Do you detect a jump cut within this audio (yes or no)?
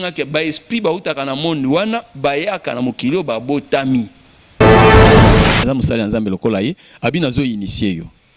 yes